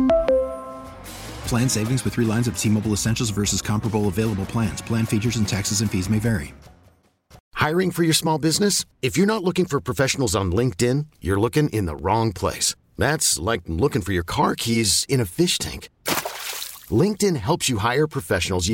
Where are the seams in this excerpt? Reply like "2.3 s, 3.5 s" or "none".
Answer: 7.4 s